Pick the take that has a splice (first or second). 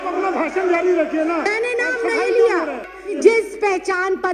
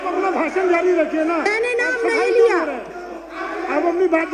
first